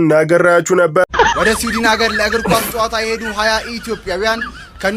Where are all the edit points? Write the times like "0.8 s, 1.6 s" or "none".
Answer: 1.1 s